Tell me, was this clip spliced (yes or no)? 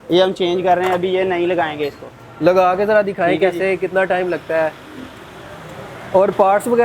no